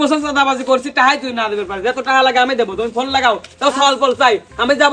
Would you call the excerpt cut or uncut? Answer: uncut